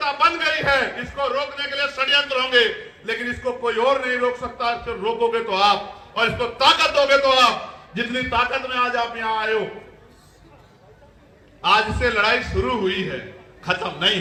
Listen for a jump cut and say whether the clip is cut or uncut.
uncut